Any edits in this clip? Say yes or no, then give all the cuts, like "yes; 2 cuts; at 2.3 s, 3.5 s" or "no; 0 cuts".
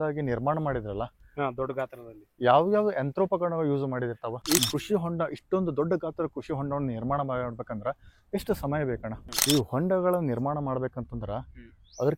yes; 2 cuts; at 4.4 s, 9.1 s